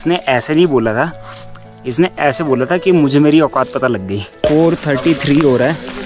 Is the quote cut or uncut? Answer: cut